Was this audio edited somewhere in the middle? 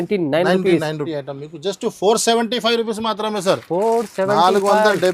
yes; 1 cut; at 1.0 s

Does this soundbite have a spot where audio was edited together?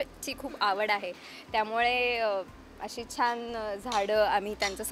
no; 0 cuts

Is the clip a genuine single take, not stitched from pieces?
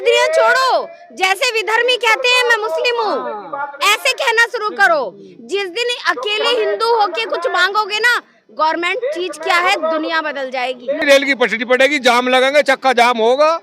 no; 1 cut; at 11.0 s

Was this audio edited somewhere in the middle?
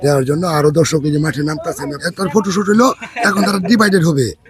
yes; 1 cut; at 2.0 s

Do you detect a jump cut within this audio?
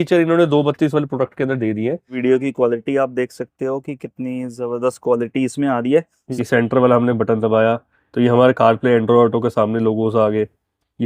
yes; 2 cuts; at 2.2 s, 6.2 s

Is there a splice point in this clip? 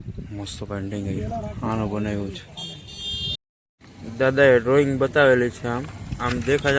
yes; 1 cut; at 3.4 s

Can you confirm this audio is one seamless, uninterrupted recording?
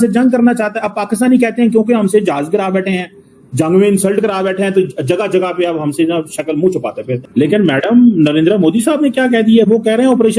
no; 1 cut; at 7.3 s

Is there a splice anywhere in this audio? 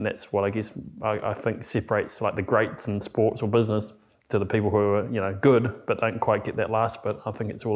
no; 0 cuts

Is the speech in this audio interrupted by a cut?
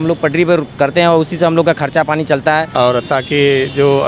yes; 1 cut; at 2.7 s

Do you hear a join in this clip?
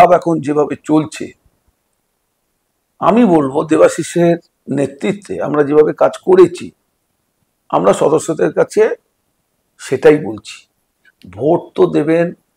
no; 0 cuts

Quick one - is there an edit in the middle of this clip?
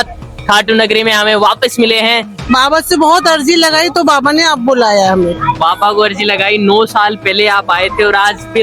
yes; 1 cut; at 2.3 s

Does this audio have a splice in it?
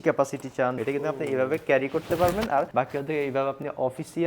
yes; 2 cuts; at 0.8 s, 2.7 s

